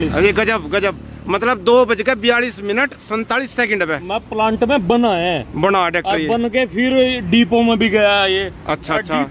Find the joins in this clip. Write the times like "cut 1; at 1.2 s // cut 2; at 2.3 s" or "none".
none